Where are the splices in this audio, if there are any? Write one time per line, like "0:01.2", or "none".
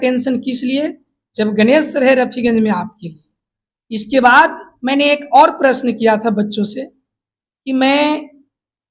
none